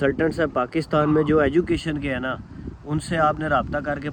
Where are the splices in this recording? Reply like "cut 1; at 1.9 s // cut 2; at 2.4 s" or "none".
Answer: none